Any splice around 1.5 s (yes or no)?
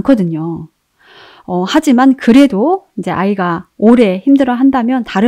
no